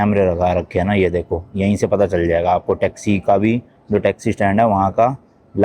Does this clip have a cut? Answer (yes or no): no